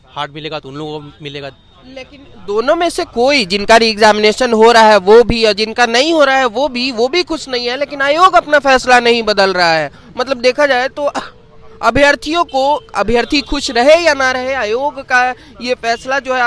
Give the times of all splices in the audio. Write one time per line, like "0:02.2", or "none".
none